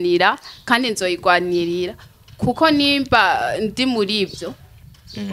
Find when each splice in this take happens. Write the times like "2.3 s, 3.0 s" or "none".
none